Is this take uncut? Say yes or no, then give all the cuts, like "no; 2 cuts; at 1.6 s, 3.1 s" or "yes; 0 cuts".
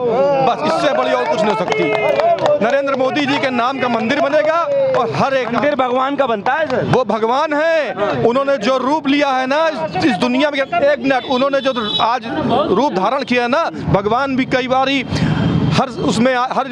yes; 0 cuts